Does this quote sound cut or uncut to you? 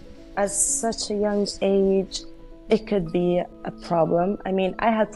uncut